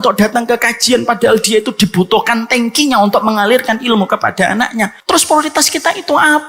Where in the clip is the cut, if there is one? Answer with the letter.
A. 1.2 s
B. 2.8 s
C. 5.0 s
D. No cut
C